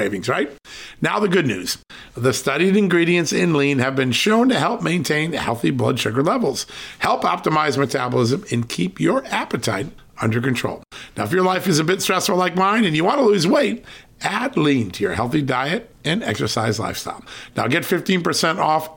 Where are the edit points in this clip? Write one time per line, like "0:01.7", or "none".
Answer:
none